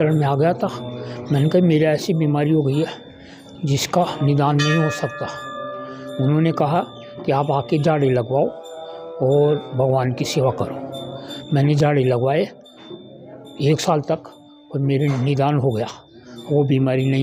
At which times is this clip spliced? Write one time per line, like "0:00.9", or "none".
none